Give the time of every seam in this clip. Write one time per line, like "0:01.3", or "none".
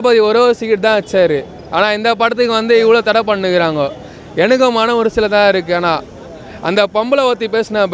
none